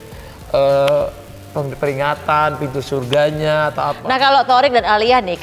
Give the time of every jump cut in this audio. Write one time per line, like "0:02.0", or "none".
0:04.0